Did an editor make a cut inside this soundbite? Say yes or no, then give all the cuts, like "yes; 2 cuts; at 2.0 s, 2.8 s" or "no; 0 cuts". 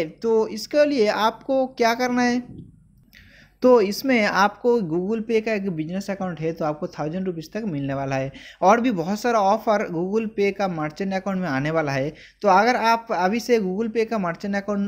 no; 0 cuts